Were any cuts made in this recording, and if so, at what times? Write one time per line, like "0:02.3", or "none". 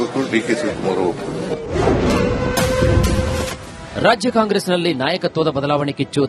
0:01.1